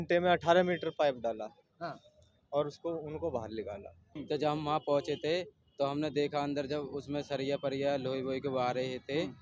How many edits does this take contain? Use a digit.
1